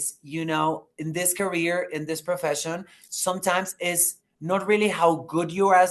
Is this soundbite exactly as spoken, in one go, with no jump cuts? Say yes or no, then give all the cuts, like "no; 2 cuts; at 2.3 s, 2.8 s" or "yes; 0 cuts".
yes; 0 cuts